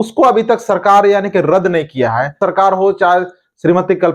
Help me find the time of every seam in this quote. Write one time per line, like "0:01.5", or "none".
0:02.3